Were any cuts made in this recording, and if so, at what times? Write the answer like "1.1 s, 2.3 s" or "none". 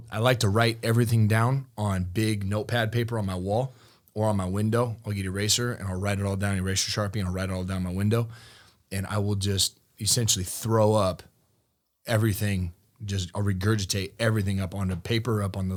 none

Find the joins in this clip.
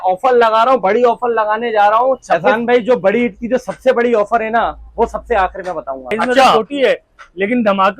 2.4 s, 6.5 s

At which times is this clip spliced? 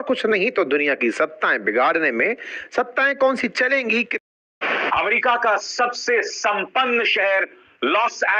4.2 s

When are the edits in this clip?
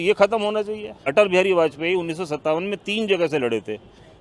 1.0 s

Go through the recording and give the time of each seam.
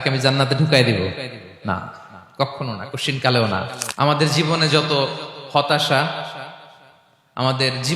3.8 s

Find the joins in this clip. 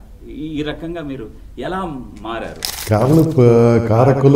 2.7 s

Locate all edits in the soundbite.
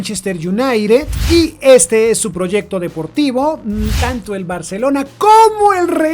3.7 s

